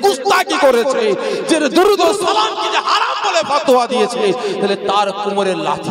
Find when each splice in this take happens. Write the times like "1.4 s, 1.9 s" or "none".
none